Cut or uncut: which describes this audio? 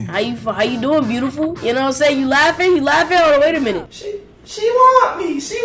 uncut